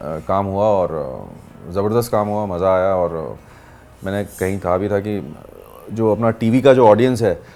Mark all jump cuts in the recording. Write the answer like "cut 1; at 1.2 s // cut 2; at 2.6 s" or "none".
none